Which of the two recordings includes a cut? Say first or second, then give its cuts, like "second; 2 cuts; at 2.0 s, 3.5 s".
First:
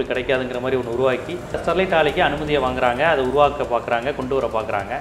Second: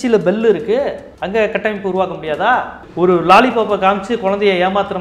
second; 2 cuts; at 1.1 s, 2.8 s